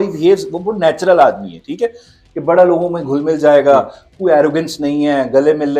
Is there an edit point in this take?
no; 0 cuts

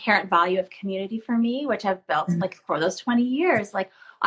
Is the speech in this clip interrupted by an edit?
no; 0 cuts

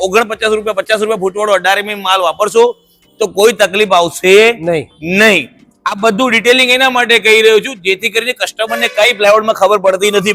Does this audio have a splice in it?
no; 0 cuts

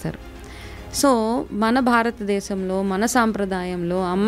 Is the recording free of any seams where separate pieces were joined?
yes; 0 cuts

